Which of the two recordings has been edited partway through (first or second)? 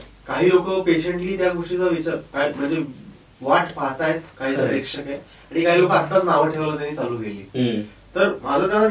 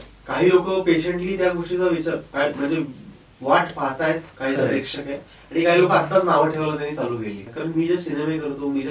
second